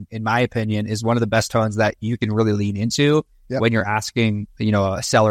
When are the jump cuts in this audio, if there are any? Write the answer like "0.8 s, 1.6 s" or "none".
none